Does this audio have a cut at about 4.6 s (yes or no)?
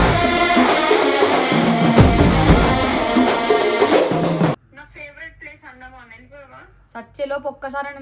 yes